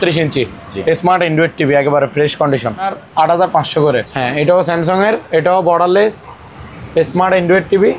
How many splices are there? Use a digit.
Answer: 2